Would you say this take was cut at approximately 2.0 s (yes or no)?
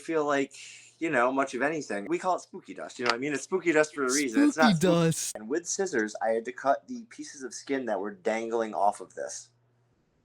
yes